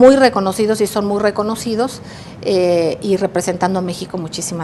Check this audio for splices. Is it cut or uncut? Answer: uncut